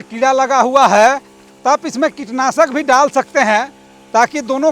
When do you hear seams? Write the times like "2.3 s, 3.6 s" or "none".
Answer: none